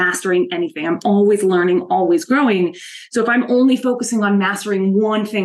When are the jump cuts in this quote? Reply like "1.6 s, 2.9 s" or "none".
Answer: none